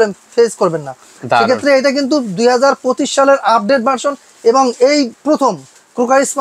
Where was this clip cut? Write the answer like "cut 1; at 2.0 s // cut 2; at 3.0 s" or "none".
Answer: none